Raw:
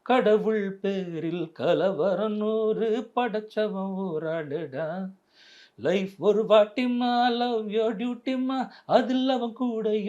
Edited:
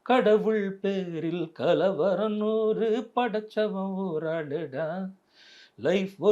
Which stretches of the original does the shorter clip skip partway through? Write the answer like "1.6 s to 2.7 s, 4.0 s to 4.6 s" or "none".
none